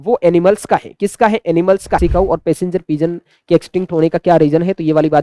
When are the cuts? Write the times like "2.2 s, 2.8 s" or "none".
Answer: 2.0 s